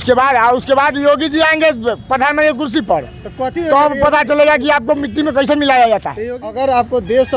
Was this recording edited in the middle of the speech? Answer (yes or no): yes